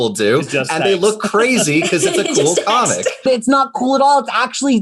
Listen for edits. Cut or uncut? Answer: cut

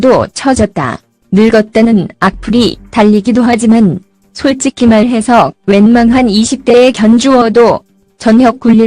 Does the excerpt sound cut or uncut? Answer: cut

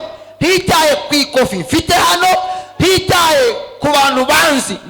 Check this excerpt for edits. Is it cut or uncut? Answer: uncut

